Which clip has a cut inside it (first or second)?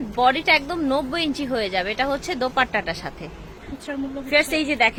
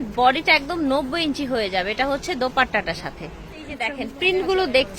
second